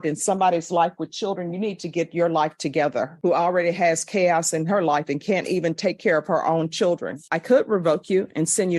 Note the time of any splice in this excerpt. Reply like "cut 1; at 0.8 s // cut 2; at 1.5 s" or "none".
cut 1; at 3.1 s // cut 2; at 7.3 s